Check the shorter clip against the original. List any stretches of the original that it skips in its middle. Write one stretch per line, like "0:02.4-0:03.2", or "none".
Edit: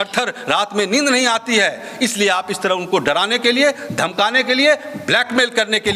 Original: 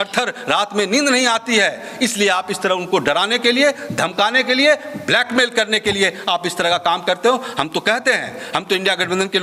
none